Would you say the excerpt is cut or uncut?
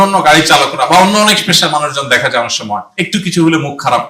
cut